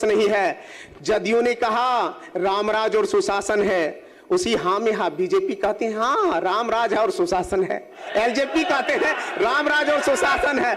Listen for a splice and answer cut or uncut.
uncut